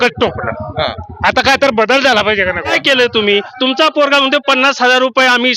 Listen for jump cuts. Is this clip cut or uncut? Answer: cut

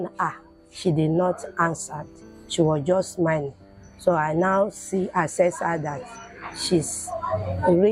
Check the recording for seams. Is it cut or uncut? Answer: uncut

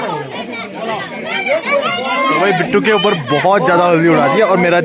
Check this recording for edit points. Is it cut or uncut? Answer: uncut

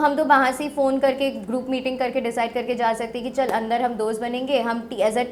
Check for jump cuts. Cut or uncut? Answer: uncut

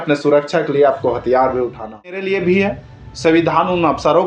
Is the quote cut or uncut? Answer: cut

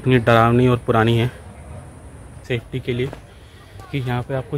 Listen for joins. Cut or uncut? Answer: cut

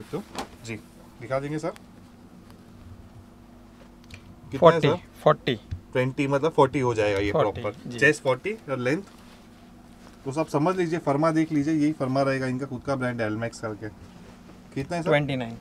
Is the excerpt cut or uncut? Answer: uncut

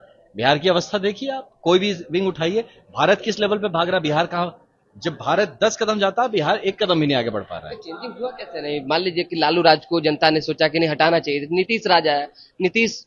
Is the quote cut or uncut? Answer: uncut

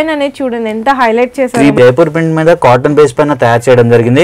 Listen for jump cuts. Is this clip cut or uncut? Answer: cut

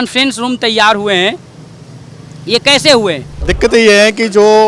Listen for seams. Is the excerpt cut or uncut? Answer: cut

